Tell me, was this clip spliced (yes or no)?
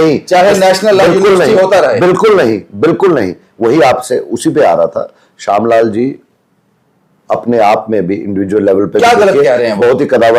no